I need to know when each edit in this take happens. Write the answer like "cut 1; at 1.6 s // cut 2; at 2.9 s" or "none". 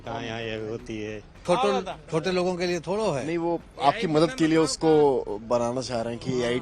cut 1; at 1.4 s